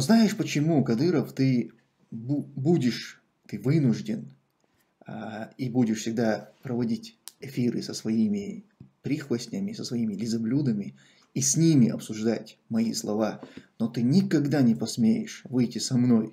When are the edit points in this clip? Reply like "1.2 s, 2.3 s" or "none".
none